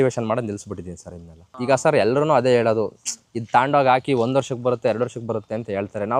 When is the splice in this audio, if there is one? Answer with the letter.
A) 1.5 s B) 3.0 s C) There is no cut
A